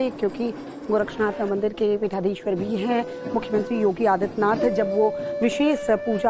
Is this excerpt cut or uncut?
uncut